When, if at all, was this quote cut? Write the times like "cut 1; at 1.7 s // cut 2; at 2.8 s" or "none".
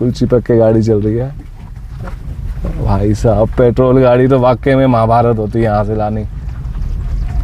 none